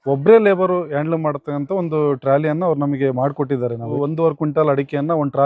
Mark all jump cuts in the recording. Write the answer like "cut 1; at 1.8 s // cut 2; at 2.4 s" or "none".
cut 1; at 3.8 s